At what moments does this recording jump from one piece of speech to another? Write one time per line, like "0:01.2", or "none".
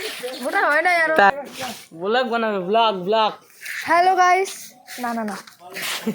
0:01.3